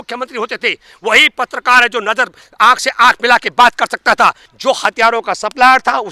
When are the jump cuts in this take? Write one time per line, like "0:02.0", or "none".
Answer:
0:04.5